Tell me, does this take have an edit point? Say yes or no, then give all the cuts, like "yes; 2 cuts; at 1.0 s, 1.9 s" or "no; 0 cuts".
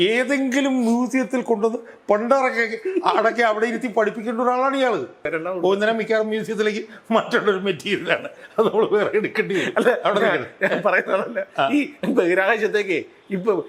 yes; 1 cut; at 5.3 s